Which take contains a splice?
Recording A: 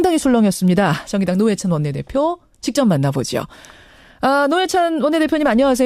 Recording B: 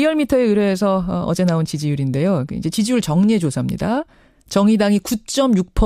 A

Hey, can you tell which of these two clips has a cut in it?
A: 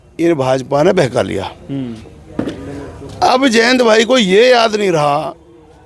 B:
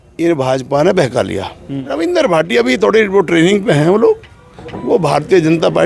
B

